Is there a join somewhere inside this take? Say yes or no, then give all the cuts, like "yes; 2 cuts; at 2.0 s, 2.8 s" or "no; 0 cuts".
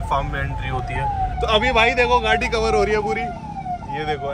yes; 1 cut; at 1.3 s